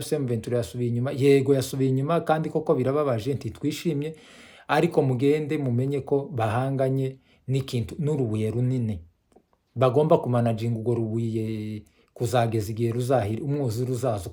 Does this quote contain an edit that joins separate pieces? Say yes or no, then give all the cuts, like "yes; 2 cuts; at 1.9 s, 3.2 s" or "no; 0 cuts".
no; 0 cuts